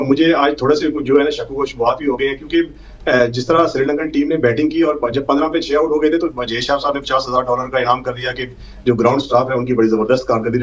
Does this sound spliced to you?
no; 0 cuts

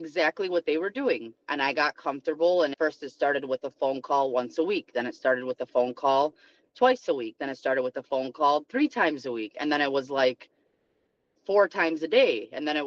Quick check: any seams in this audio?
no; 0 cuts

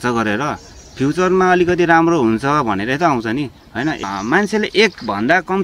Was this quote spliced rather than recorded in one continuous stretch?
yes; 1 cut; at 4.0 s

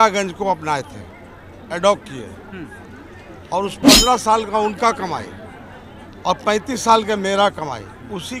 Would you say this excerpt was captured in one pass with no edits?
yes; 0 cuts

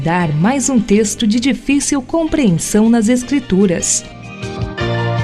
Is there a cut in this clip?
yes; 1 cut; at 4.0 s

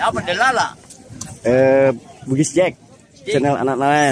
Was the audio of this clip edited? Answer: no; 0 cuts

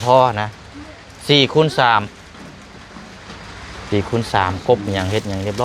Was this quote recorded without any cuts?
yes; 0 cuts

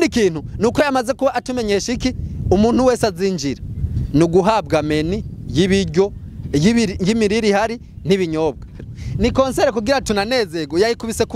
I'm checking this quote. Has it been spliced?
yes; 1 cut; at 8.8 s

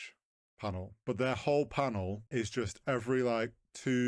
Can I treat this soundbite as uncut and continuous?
no; 2 cuts; at 0.9 s, 2.2 s

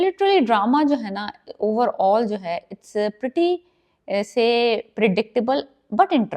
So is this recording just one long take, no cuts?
yes; 0 cuts

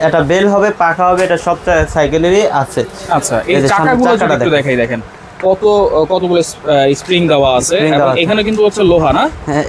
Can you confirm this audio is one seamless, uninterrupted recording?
yes; 0 cuts

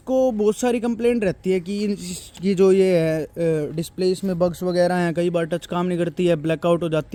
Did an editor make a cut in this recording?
no; 0 cuts

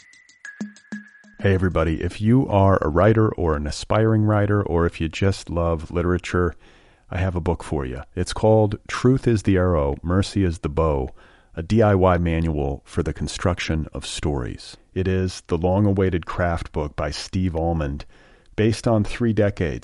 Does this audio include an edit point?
yes; 1 cut; at 0.9 s

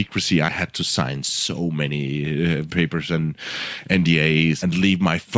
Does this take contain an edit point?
yes; 3 cuts; at 1.0 s, 2.7 s, 4.6 s

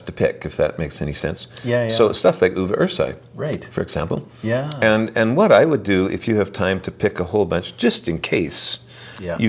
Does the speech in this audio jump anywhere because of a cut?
no; 0 cuts

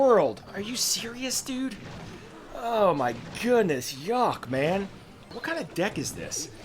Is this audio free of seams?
no; 1 cut; at 5.3 s

